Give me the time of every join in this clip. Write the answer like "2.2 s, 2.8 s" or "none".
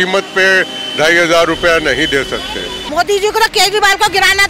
2.7 s